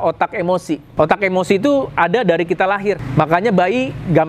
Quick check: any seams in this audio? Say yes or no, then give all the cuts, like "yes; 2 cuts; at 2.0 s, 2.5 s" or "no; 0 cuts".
yes; 2 cuts; at 0.9 s, 3.0 s